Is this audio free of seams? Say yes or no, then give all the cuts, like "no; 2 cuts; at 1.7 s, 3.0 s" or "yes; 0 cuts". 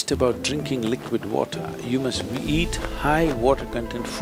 yes; 0 cuts